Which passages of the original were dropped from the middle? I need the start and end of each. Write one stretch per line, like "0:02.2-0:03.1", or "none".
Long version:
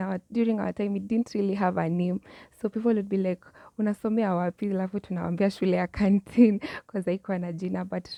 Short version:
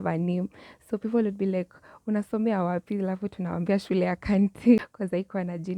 0:06.5-0:06.7